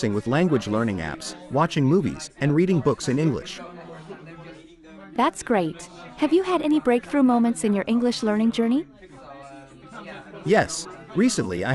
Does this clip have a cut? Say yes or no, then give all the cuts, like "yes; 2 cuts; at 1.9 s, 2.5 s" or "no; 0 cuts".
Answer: no; 0 cuts